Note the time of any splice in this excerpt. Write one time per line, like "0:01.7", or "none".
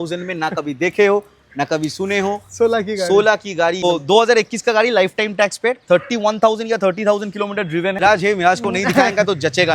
0:03.8
0:08.0